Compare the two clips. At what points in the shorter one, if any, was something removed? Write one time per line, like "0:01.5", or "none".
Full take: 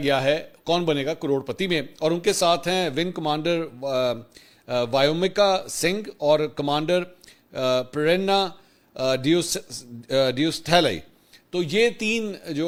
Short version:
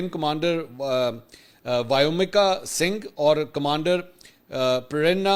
none